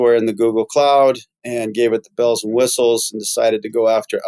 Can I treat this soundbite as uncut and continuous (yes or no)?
yes